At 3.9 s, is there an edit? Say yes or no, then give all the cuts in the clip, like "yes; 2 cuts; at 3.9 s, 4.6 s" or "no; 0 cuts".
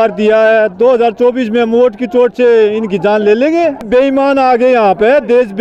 yes; 1 cut; at 3.9 s